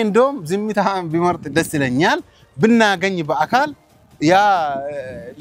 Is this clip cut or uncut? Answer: uncut